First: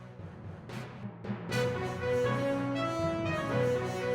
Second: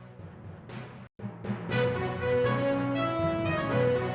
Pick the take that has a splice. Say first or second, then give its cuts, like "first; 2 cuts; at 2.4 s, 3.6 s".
first; 1 cut; at 1.0 s